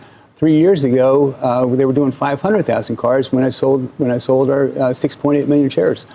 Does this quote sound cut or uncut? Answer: uncut